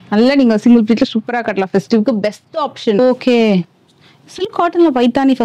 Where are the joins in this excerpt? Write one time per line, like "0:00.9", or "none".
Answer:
0:03.0